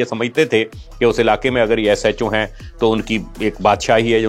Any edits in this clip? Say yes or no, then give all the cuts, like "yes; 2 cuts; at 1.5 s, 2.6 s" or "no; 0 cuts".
no; 0 cuts